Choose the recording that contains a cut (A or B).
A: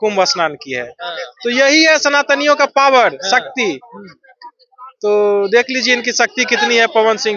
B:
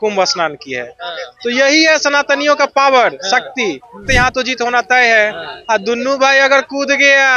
B